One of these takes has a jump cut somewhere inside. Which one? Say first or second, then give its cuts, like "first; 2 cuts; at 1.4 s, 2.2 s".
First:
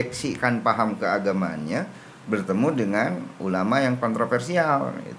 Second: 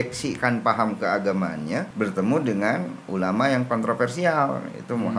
second; 1 cut; at 1.9 s